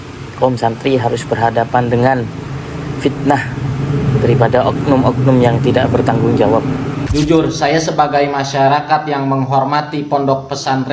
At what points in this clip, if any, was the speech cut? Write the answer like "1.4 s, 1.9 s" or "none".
7.0 s